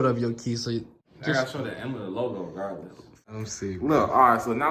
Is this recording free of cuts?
no; 2 cuts; at 1.0 s, 3.4 s

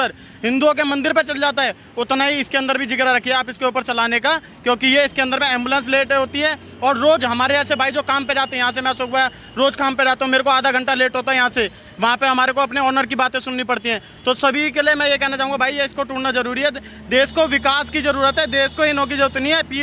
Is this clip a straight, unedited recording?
yes; 0 cuts

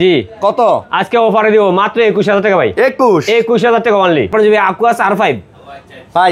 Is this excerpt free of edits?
no; 1 cut; at 4.3 s

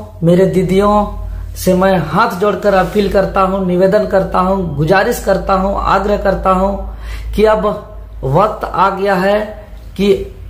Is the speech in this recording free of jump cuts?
yes; 0 cuts

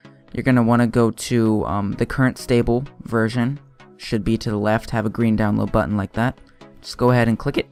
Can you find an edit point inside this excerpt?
no; 0 cuts

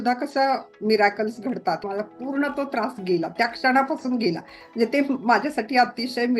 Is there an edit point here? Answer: yes; 1 cut; at 1.8 s

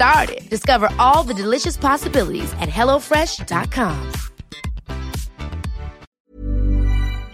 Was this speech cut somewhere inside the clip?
yes; 1 cut; at 6.0 s

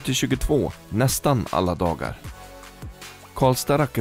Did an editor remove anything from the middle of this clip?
no; 0 cuts

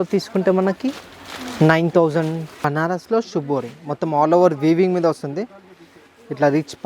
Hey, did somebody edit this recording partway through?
yes; 1 cut; at 2.6 s

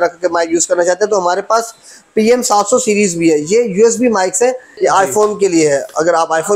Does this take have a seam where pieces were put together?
yes; 1 cut; at 4.7 s

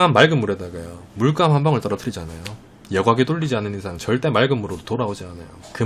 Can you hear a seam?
no; 0 cuts

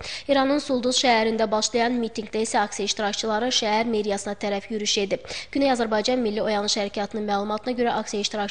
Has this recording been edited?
no; 0 cuts

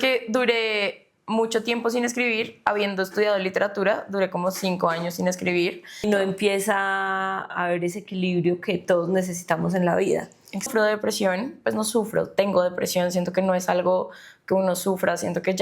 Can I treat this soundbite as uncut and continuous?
no; 2 cuts; at 6.0 s, 10.7 s

